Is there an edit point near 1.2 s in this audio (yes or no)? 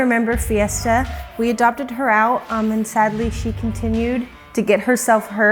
no